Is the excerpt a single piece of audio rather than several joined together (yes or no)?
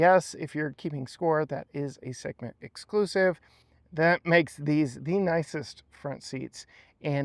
yes